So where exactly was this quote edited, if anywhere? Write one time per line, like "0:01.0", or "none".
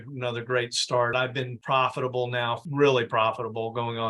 0:01.1
0:02.6